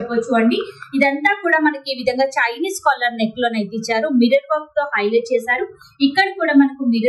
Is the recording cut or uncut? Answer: uncut